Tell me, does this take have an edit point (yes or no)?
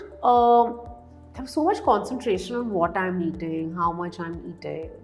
no